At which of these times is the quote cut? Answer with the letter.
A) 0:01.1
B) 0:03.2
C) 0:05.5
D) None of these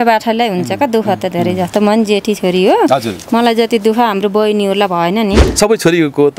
C